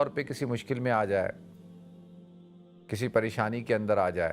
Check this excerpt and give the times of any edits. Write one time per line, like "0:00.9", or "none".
0:01.4
0:02.9